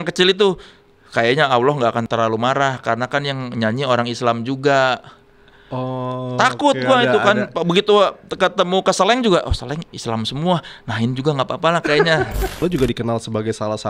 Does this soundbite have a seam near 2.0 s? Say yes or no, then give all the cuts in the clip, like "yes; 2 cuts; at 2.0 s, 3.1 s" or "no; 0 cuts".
yes; 2 cuts; at 2.0 s, 12.6 s